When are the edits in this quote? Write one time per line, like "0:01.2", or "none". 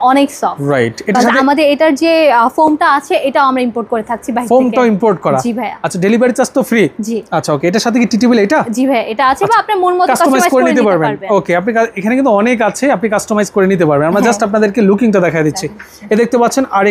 none